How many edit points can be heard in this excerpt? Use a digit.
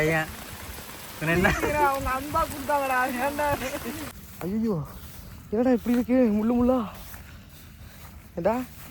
1